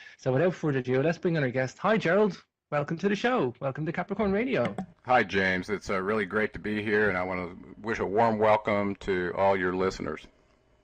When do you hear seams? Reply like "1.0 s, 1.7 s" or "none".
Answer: 1.0 s